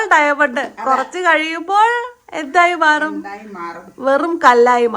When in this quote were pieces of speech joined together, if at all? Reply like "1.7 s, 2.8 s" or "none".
none